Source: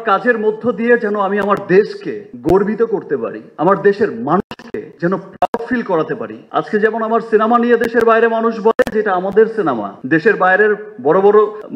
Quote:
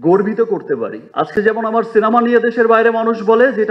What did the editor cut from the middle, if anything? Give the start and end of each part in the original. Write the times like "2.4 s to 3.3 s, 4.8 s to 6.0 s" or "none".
3.4 s to 6.4 s